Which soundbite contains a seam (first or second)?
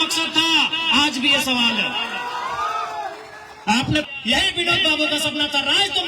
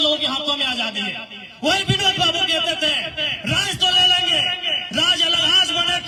first